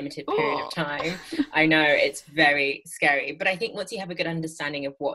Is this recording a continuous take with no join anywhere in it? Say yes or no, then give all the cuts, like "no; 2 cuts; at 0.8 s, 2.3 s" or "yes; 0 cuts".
yes; 0 cuts